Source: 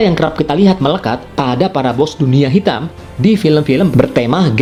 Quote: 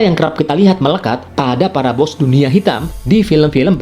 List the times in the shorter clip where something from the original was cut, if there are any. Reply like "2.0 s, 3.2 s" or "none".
2.9 s